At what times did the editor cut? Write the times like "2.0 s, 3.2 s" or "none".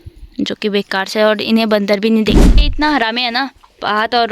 2.6 s